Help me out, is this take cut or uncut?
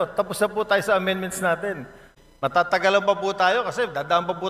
cut